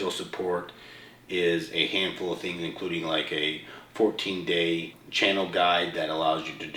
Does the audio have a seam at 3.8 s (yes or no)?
no